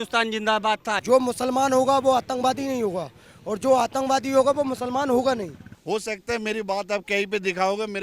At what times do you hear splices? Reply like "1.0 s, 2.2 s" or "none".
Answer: 1.0 s, 5.7 s